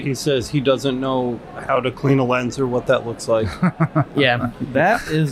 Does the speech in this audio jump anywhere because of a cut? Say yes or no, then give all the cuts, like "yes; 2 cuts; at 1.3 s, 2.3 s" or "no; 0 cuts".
no; 0 cuts